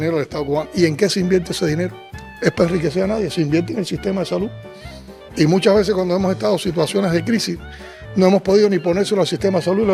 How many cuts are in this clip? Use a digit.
0